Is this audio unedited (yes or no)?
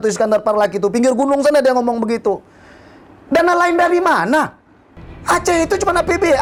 yes